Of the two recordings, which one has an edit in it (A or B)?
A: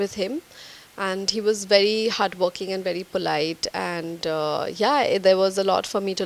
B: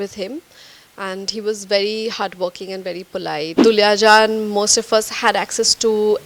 B